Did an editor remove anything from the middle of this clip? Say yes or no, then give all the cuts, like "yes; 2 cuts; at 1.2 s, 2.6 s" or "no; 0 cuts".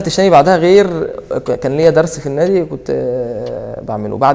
no; 0 cuts